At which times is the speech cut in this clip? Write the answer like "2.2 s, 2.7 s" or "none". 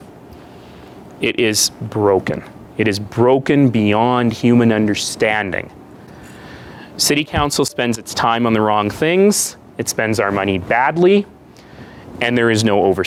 none